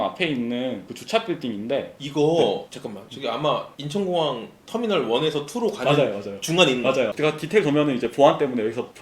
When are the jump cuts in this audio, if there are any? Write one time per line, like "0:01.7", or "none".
0:07.1